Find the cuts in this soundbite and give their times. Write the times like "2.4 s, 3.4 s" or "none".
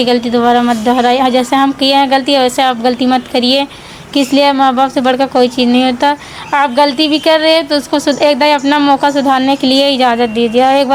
none